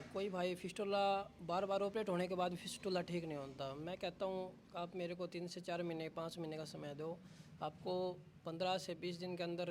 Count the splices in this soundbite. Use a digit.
0